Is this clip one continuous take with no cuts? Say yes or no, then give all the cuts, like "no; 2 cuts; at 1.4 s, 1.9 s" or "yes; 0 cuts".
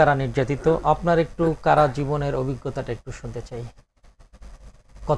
yes; 0 cuts